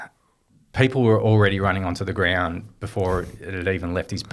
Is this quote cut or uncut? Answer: uncut